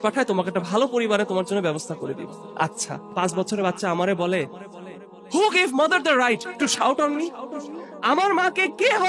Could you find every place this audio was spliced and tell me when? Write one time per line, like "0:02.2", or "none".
0:03.1